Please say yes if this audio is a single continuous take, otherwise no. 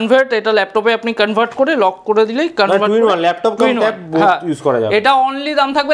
yes